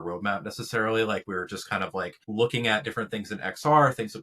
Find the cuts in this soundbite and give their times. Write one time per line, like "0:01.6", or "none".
0:02.2